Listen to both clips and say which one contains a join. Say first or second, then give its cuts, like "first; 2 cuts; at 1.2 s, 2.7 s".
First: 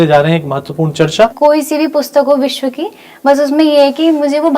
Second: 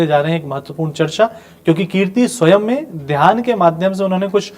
first; 1 cut; at 1.3 s